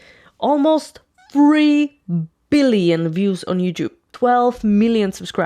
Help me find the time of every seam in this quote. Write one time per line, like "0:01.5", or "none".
0:04.1